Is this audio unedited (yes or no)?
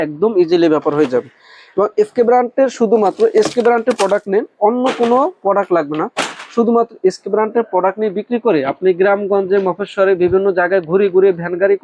yes